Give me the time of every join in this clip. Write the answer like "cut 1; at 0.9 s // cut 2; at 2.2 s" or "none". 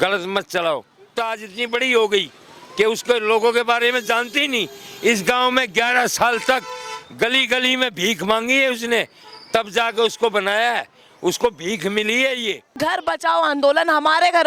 cut 1; at 1.2 s // cut 2; at 12.7 s